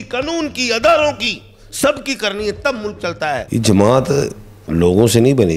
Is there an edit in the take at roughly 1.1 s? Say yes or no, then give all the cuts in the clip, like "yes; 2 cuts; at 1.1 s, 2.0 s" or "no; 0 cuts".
no; 1 cut; at 3.5 s